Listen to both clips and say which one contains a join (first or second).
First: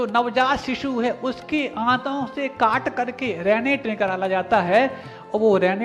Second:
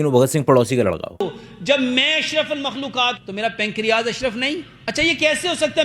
second